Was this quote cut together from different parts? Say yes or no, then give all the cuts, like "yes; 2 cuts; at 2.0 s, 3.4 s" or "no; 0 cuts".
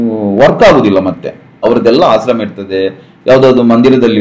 yes; 1 cut; at 1.6 s